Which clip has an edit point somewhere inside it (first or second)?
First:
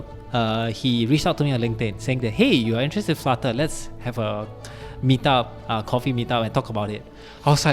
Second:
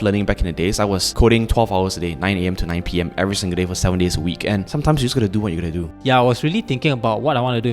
second